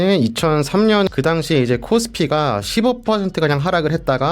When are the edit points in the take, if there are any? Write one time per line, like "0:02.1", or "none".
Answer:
0:01.1